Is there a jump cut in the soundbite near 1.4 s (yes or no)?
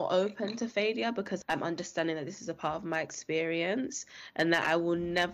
yes